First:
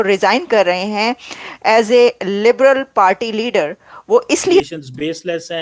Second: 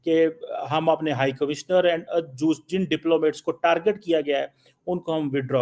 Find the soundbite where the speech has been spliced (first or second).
first